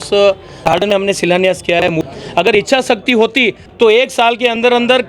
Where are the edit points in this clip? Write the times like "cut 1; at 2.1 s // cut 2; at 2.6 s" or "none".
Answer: cut 1; at 2.1 s